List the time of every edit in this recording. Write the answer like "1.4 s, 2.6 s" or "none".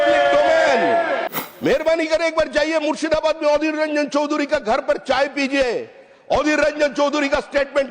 1.3 s